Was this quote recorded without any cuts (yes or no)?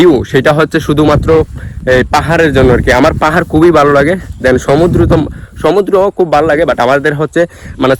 yes